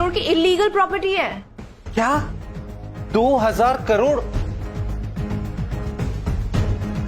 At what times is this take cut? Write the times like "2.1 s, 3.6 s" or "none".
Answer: none